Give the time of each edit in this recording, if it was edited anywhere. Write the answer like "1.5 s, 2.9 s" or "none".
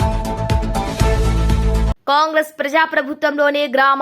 1.9 s